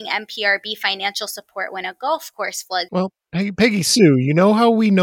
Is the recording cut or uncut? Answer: cut